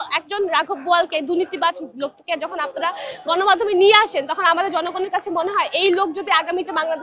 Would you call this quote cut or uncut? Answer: uncut